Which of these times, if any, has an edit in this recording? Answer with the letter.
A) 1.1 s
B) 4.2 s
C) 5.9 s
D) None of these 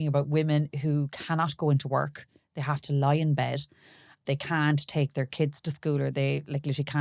B